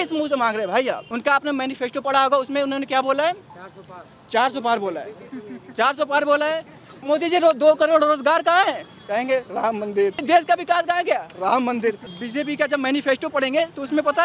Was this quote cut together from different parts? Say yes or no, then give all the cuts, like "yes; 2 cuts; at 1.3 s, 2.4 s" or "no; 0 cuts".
yes; 4 cuts; at 1.1 s, 7.0 s, 10.2 s, 12.1 s